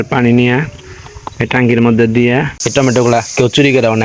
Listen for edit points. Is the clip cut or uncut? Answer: cut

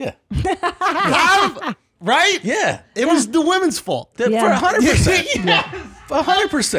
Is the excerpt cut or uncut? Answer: uncut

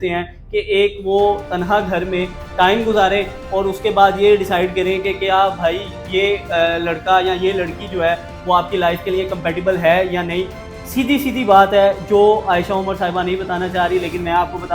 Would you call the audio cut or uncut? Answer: uncut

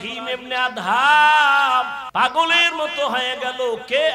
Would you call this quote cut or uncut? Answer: cut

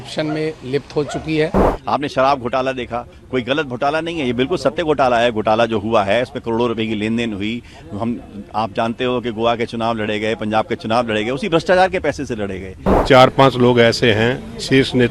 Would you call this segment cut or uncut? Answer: cut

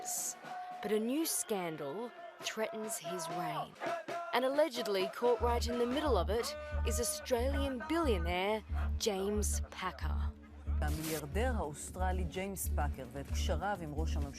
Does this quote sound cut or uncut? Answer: cut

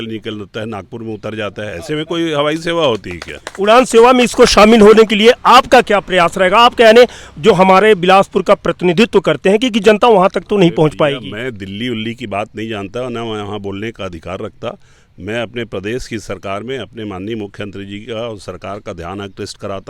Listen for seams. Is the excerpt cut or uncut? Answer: uncut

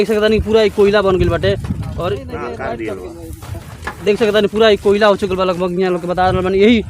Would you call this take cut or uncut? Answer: cut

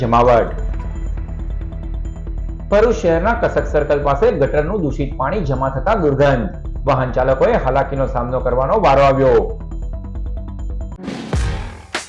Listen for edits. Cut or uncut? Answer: cut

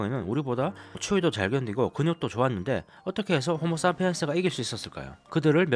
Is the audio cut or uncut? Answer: uncut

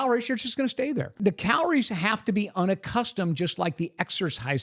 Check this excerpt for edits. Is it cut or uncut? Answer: cut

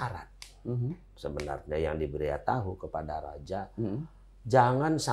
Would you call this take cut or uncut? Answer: uncut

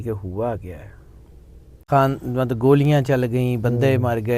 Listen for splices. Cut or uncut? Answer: cut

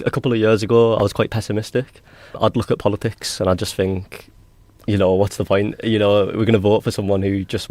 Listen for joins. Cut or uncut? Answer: uncut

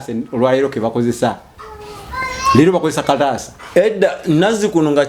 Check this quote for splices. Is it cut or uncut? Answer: uncut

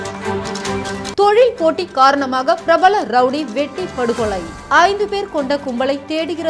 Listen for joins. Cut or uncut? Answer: cut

